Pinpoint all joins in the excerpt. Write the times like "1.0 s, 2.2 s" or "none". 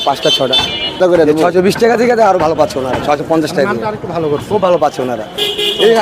1.0 s